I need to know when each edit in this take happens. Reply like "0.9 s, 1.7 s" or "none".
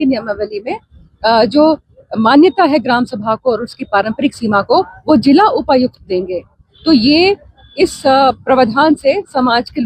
none